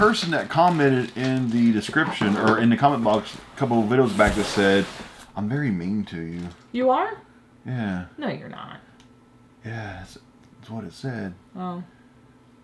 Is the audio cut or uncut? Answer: uncut